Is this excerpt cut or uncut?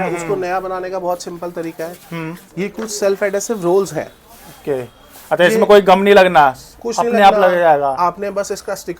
uncut